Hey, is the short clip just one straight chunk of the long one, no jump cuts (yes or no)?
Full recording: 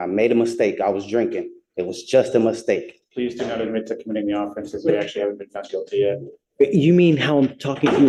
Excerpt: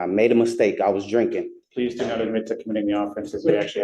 no